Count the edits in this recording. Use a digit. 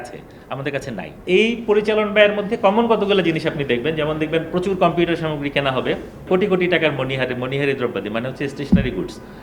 2